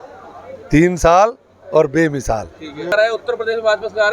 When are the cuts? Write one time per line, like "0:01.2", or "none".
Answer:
0:02.9